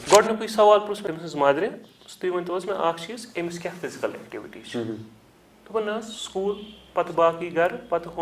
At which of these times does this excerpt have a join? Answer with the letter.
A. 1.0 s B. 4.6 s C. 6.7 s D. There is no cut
A